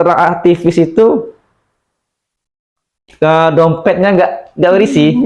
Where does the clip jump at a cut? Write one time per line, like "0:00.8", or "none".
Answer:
none